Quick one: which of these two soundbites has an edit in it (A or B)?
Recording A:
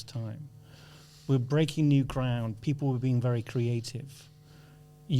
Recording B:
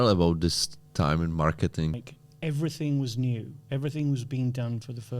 B